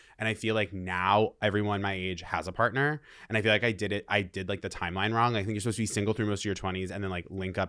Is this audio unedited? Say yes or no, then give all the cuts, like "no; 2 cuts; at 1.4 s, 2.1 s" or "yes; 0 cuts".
yes; 0 cuts